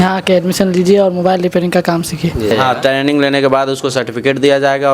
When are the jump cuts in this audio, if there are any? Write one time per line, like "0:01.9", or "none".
0:02.5